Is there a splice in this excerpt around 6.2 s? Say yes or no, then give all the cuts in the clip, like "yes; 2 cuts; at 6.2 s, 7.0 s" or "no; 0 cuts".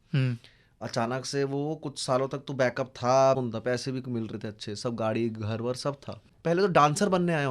yes; 2 cuts; at 3.4 s, 6.2 s